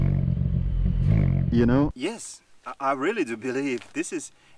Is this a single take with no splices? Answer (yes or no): no